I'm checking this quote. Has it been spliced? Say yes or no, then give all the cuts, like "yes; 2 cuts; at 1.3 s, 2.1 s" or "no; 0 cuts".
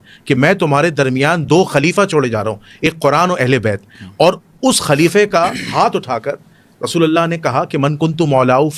no; 0 cuts